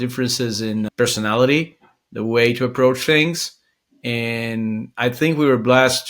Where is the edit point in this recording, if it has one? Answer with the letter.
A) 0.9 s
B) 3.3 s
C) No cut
A